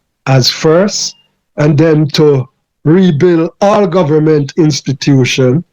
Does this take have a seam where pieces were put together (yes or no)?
no